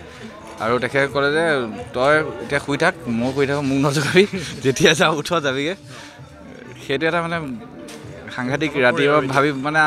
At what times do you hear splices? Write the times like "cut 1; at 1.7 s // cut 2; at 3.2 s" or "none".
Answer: none